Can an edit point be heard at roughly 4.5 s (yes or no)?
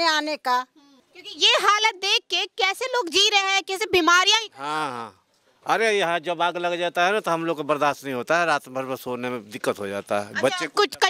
no